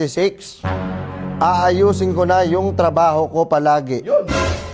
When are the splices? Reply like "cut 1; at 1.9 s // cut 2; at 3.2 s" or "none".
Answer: none